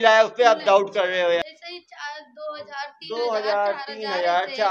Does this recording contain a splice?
yes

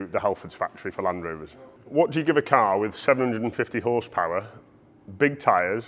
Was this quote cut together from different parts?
yes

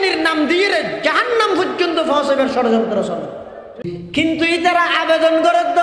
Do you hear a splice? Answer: yes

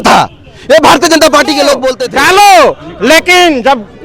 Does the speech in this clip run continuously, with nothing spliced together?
no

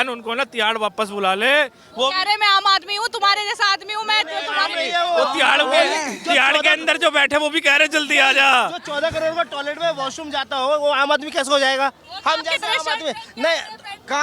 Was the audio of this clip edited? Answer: no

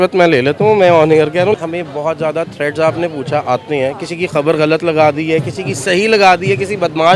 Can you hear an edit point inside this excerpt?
yes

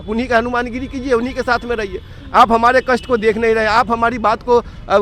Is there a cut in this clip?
no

